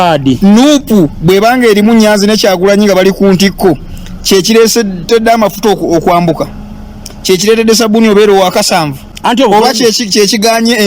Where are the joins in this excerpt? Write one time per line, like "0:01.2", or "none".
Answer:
0:09.0